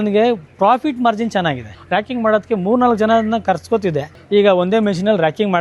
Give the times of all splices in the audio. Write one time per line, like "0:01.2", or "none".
0:01.7
0:04.1